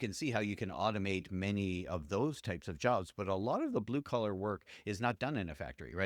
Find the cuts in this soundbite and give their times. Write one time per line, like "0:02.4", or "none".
none